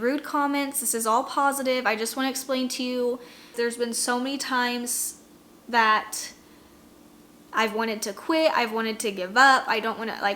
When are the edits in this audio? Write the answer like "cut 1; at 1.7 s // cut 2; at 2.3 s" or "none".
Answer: cut 1; at 3.4 s